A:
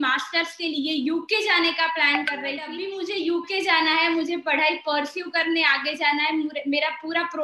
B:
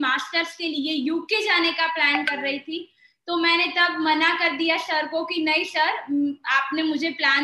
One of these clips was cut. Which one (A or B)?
A